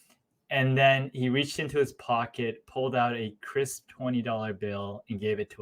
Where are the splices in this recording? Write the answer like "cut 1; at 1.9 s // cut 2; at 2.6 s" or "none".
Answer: none

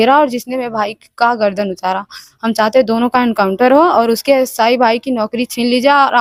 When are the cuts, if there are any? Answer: none

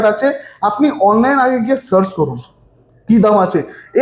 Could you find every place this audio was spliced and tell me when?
none

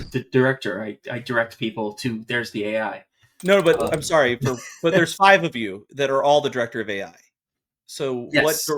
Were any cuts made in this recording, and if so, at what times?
none

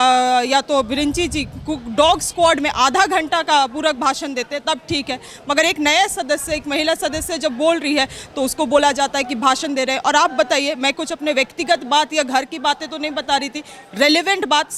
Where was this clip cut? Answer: none

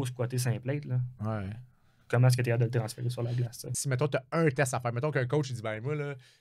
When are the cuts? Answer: cut 1; at 3.7 s

